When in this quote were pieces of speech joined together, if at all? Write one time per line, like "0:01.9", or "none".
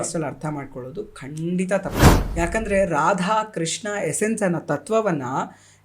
0:01.9